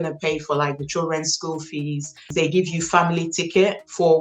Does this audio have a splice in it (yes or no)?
yes